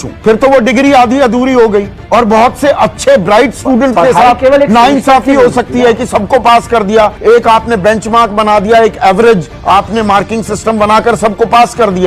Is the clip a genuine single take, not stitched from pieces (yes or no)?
yes